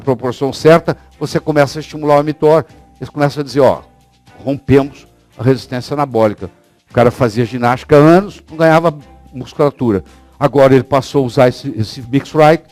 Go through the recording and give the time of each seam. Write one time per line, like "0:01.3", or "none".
none